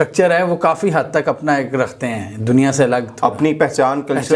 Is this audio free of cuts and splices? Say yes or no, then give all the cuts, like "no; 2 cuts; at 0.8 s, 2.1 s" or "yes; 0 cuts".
yes; 0 cuts